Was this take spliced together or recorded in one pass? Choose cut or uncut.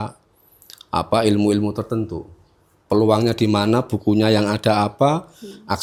uncut